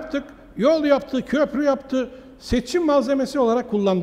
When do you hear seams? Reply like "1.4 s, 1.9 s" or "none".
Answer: none